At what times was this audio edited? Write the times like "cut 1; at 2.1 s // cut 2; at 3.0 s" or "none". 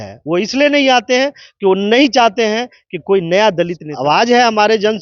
cut 1; at 3.8 s